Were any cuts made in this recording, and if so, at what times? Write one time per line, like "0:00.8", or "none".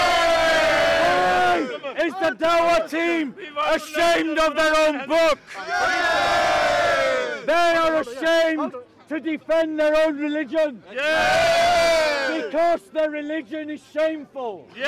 none